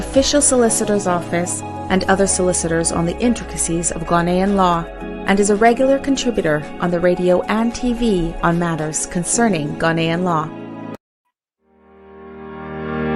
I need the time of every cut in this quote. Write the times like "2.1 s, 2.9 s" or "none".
11.0 s